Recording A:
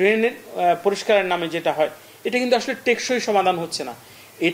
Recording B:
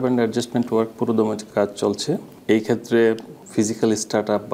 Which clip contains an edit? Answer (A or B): B